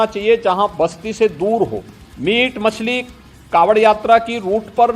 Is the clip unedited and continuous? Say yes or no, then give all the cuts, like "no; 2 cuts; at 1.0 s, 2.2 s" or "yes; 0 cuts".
yes; 0 cuts